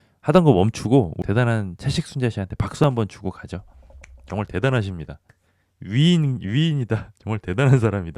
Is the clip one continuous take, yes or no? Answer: no